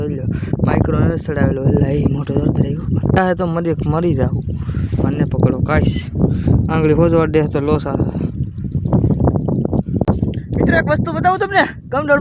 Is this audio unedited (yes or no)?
no